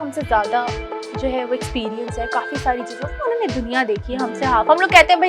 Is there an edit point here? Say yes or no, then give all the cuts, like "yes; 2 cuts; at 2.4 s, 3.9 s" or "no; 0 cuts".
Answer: no; 0 cuts